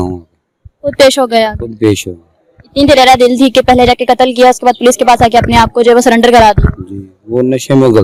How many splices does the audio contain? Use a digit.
0